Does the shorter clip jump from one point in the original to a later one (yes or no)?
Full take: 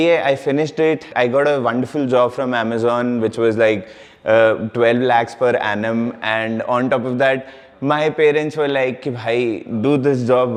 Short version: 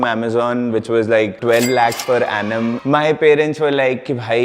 yes